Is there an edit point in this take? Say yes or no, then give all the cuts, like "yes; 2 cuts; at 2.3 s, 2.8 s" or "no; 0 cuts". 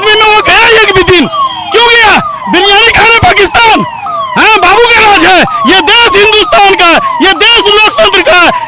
no; 0 cuts